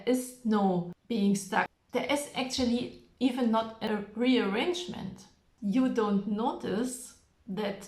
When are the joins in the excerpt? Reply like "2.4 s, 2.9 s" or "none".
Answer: 1.0 s, 1.7 s, 3.8 s, 5.5 s